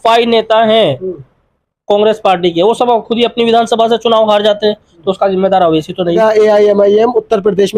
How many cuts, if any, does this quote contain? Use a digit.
1